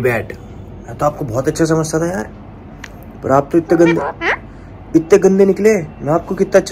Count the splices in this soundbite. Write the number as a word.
zero